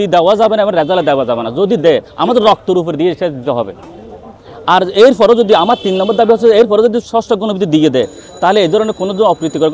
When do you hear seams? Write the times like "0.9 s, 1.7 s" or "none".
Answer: none